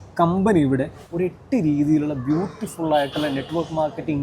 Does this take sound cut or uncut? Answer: cut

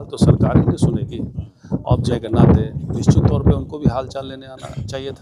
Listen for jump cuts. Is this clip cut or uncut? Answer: cut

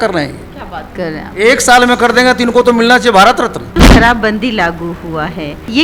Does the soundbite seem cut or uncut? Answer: cut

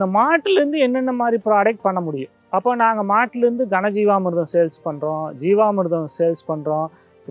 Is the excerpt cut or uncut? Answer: uncut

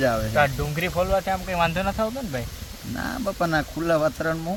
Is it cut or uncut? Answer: uncut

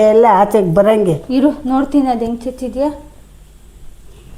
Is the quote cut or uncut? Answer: uncut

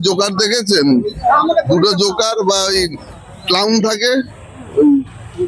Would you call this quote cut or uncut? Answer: uncut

